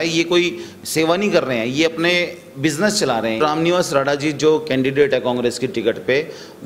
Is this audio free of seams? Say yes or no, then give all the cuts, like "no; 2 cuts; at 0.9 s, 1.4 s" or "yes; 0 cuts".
no; 1 cut; at 3.4 s